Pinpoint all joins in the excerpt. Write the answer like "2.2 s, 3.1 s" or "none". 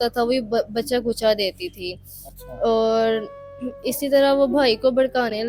none